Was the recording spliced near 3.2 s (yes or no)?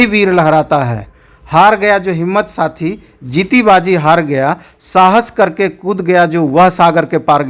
no